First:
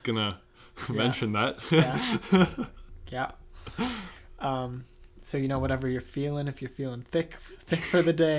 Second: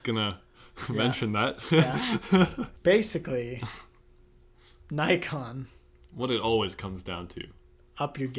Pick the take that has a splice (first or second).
second